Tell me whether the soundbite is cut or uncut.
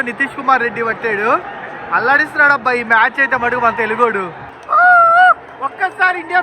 cut